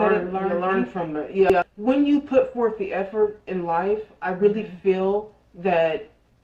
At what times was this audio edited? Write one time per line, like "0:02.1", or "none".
0:01.5